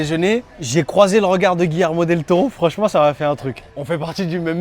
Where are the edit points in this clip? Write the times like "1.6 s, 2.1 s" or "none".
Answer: none